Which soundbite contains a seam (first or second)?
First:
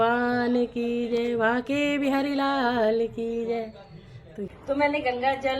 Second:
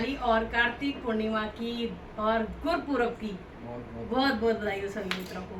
first